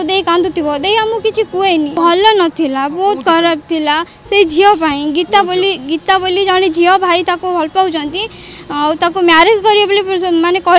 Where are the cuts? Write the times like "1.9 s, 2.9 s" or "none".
1.9 s